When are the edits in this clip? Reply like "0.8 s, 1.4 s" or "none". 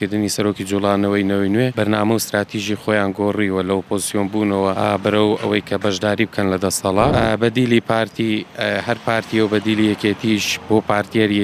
1.7 s, 4.8 s, 7.1 s